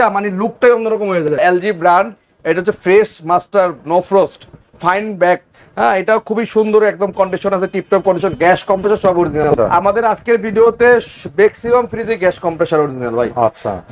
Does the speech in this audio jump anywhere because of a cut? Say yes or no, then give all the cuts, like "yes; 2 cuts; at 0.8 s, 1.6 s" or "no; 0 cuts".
yes; 2 cuts; at 1.4 s, 9.5 s